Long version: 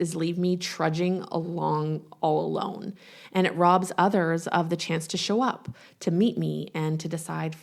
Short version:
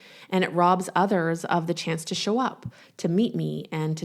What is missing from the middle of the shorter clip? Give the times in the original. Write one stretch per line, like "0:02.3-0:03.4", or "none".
none

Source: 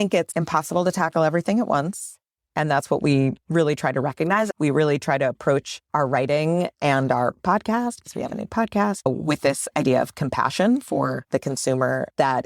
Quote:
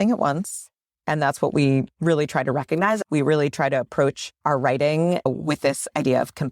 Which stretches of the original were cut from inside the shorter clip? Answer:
0:06.7-0:09.0

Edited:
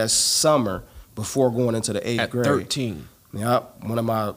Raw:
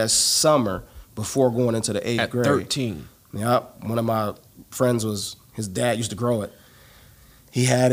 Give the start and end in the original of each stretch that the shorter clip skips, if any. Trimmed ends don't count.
none

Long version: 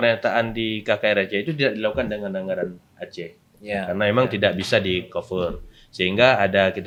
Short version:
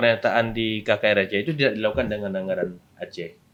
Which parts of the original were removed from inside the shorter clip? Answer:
none

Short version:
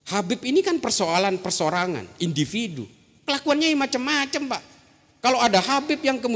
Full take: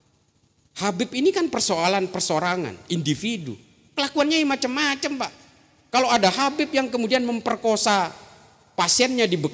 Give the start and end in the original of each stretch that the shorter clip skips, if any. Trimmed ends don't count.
none

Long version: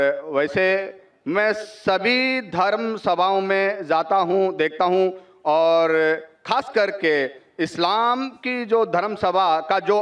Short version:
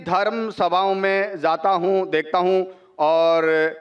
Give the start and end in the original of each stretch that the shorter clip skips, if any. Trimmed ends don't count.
none

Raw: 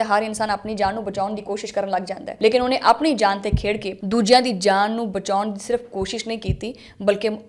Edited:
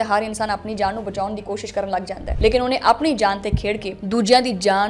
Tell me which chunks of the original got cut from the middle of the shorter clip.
none

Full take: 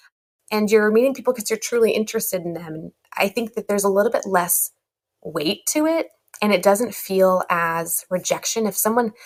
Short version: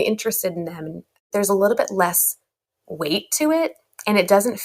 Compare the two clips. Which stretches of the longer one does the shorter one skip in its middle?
0:03.2-0:03.6

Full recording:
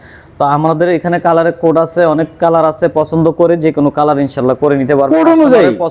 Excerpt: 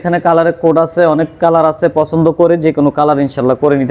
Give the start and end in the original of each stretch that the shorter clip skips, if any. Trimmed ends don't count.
none

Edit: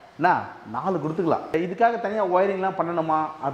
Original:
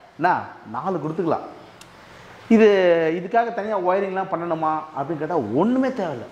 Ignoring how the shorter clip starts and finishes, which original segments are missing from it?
0:01.5-0:03.1

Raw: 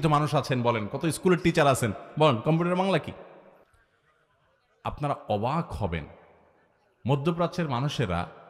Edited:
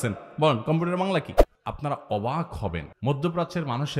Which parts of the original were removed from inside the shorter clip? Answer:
0:03.2-0:04.6
0:06.1-0:06.9

